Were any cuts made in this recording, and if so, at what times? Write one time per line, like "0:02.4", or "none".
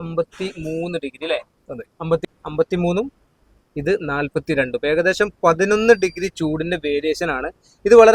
0:02.3